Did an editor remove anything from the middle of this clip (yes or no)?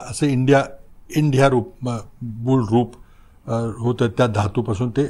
no